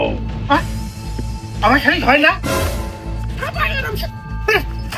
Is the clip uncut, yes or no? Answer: yes